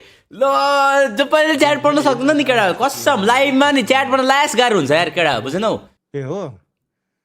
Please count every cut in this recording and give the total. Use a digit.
1